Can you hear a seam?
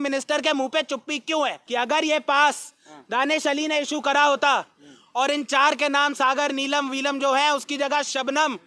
yes; 1 cut; at 1.6 s

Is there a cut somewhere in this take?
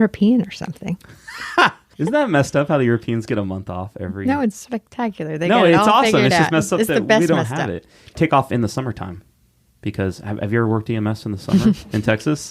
yes; 2 cuts; at 1.8 s, 8.2 s

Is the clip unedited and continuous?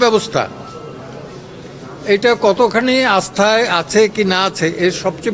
yes; 0 cuts

